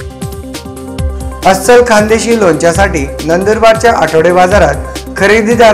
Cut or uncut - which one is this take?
uncut